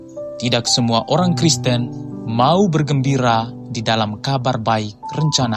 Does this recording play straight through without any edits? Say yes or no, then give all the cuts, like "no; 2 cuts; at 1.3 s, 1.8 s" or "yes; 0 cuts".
yes; 0 cuts